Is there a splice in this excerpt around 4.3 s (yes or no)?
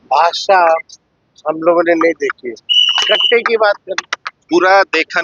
yes